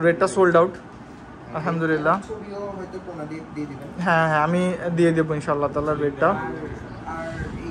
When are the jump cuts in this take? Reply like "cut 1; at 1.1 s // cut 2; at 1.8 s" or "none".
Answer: none